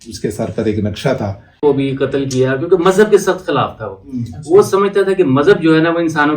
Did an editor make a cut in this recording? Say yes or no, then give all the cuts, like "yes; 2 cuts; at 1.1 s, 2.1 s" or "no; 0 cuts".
yes; 1 cut; at 1.6 s